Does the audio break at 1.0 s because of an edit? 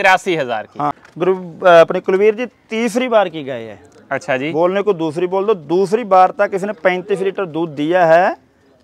yes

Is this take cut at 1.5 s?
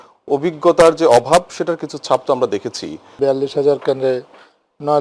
no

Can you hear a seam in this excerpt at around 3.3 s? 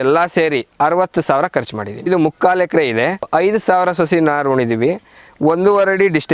yes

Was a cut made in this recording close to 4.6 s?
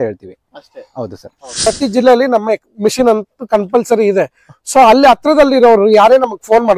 no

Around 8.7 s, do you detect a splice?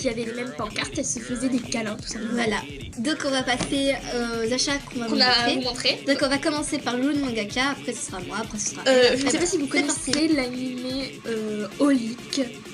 yes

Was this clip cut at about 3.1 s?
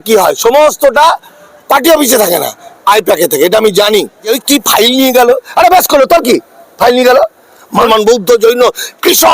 no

